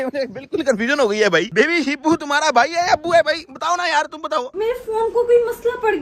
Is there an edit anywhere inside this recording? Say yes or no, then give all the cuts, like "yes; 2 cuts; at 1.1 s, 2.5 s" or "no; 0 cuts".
yes; 2 cuts; at 1.5 s, 4.5 s